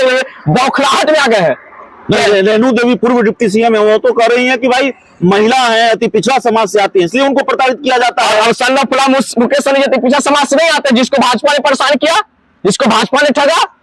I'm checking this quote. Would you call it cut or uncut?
uncut